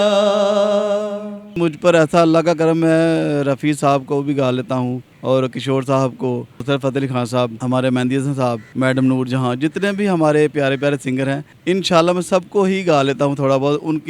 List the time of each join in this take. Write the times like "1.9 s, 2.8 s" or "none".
1.6 s, 5.1 s, 6.5 s, 7.6 s, 8.6 s, 11.5 s